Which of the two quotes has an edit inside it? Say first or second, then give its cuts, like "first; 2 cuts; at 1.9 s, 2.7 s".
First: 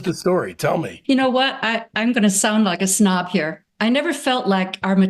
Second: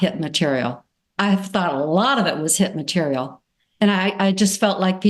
first; 2 cuts; at 0.9 s, 3.6 s